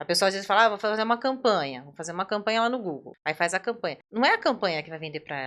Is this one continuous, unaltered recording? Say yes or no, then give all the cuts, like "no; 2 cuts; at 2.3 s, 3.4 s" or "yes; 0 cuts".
no; 2 cuts; at 3.1 s, 4.0 s